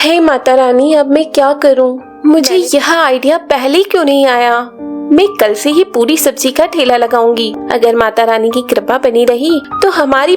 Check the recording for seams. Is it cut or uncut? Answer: cut